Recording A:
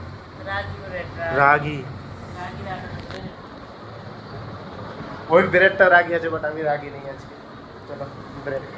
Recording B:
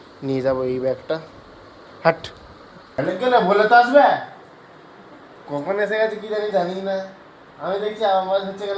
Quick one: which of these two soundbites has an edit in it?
B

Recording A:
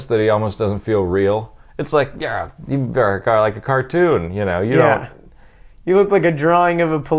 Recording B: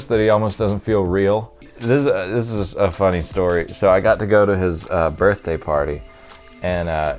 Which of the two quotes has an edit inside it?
B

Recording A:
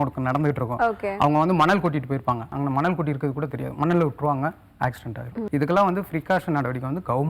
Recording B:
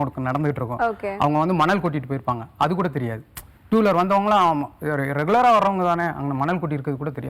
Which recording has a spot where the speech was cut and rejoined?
A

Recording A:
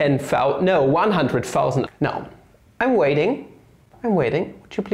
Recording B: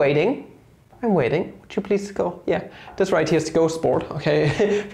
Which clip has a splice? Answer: A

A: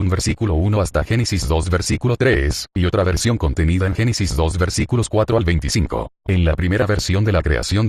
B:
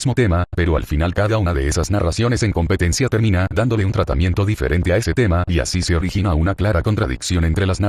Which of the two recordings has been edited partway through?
B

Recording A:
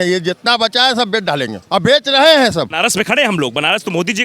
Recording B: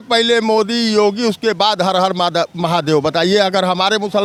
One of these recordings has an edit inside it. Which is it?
A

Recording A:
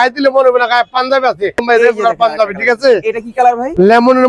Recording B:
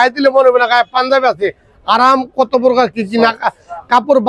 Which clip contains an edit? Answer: A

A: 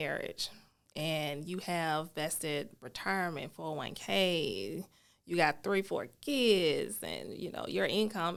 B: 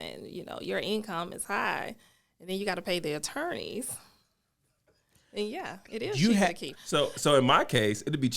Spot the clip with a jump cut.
B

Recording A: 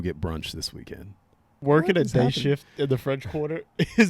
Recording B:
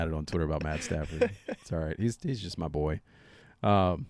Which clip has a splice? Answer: A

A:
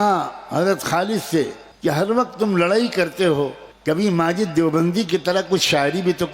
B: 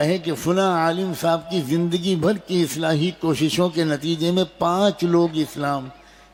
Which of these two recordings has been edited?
A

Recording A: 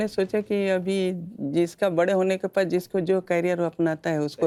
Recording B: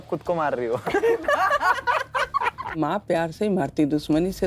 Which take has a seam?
B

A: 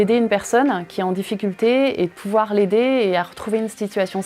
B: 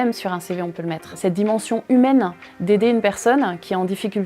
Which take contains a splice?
B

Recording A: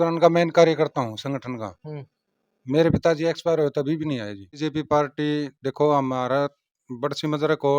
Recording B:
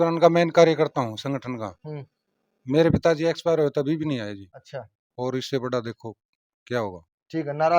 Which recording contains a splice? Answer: A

